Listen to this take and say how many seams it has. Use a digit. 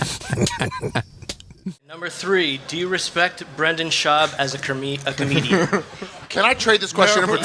1